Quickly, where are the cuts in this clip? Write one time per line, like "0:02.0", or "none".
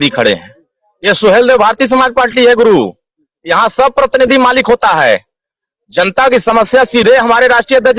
none